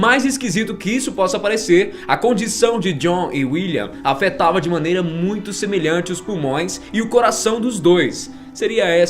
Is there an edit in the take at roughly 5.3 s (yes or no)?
no